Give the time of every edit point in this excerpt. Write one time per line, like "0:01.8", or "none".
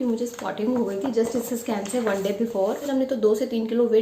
0:02.8